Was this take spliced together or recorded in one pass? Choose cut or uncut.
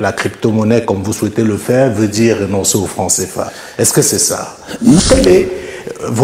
cut